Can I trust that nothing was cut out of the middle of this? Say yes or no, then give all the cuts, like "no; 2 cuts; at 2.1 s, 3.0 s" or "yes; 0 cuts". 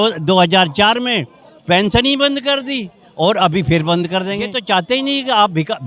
no; 1 cut; at 4.6 s